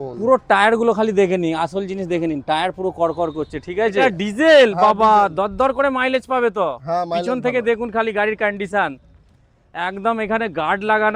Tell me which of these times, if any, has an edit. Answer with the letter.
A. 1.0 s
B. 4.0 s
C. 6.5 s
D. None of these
B